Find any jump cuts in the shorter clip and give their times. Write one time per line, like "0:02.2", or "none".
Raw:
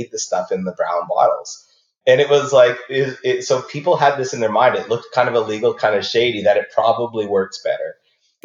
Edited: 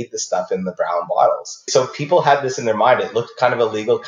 0:01.7